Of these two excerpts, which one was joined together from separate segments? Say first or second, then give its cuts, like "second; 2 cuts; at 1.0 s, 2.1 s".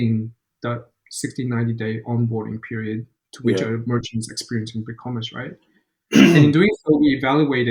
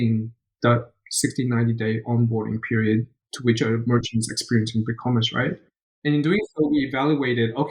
second; 1 cut; at 6.1 s